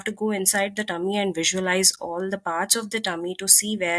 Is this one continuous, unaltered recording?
yes; 0 cuts

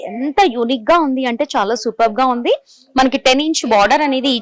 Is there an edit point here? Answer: no; 0 cuts

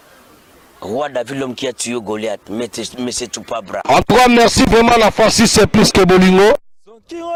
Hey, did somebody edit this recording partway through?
no; 0 cuts

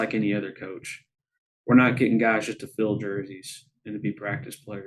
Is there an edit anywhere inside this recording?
no; 0 cuts

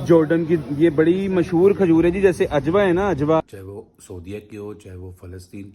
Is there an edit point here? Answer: yes; 1 cut; at 3.5 s

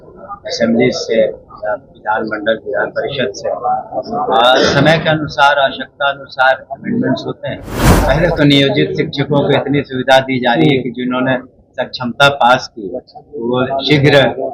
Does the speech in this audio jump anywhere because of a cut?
yes; 1 cut; at 7.9 s

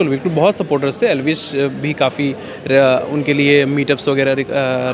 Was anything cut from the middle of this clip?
no; 0 cuts

